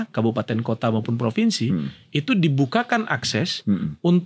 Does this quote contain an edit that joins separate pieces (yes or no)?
no